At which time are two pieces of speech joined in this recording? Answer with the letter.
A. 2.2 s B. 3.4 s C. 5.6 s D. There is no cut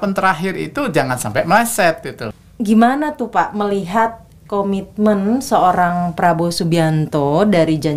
A